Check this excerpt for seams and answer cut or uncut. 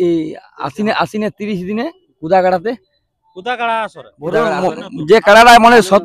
cut